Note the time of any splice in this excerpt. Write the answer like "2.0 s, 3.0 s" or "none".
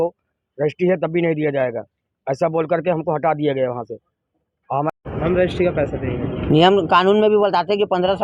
4.9 s